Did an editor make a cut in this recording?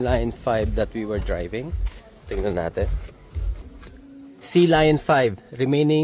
no; 0 cuts

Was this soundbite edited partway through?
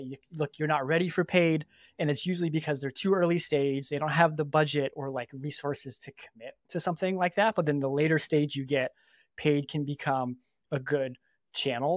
no; 0 cuts

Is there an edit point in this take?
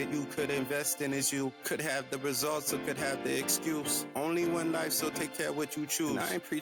no; 0 cuts

